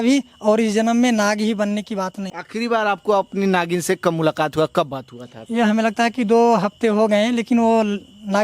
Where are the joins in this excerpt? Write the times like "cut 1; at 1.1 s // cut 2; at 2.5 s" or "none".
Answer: cut 1; at 2.2 s // cut 2; at 5.3 s